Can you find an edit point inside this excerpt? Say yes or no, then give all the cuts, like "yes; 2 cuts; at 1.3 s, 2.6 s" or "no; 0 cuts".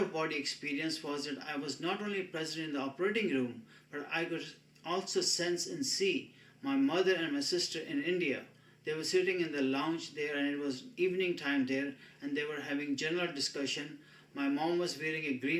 no; 0 cuts